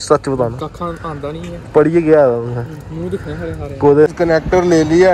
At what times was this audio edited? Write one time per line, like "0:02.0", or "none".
0:01.7
0:04.1